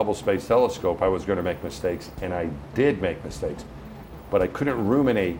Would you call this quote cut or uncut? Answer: uncut